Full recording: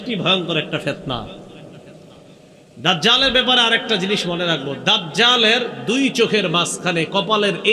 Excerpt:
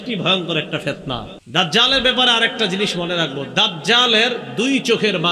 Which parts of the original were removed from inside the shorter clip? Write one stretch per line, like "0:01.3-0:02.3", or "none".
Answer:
0:01.4-0:02.7